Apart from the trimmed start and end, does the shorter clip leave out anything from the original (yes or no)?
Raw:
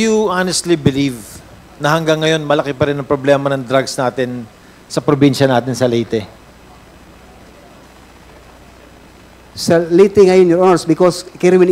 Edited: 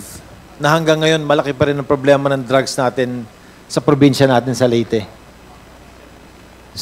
yes